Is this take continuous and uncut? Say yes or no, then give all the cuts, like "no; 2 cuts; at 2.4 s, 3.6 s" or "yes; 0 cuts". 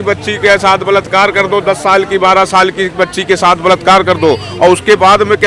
yes; 0 cuts